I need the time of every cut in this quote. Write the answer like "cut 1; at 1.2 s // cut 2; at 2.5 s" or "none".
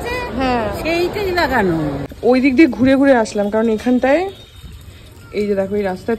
cut 1; at 2.1 s